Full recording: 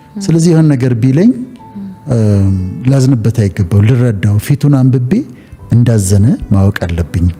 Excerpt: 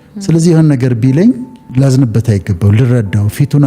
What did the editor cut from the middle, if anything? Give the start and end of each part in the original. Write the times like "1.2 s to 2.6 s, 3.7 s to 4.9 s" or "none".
1.6 s to 2.7 s